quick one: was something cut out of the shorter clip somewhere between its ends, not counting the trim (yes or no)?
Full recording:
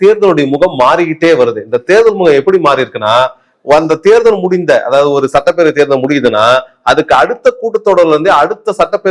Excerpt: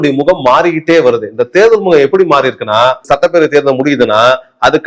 yes